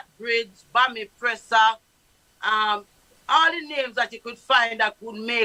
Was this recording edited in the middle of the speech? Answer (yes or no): no